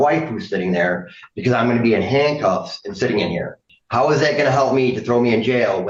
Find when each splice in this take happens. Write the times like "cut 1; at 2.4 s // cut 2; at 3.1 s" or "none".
none